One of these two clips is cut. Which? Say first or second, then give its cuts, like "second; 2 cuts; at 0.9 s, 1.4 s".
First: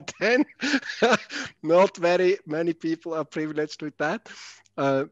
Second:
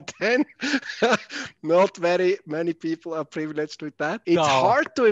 second; 1 cut; at 4.2 s